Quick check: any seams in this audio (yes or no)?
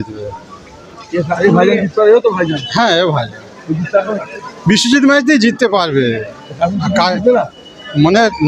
no